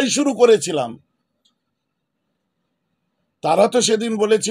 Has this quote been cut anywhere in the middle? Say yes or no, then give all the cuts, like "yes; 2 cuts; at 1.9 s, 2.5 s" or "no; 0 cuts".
no; 0 cuts